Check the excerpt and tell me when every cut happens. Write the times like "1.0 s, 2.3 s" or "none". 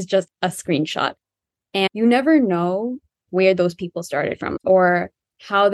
1.9 s, 3.2 s, 4.5 s